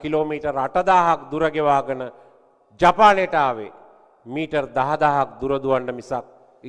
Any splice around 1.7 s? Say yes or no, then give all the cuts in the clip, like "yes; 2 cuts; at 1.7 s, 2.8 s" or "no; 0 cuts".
no; 0 cuts